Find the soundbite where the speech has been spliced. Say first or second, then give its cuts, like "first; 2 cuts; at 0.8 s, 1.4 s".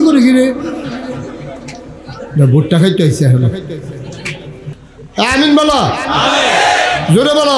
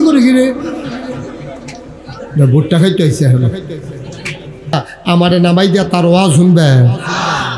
second; 1 cut; at 4.7 s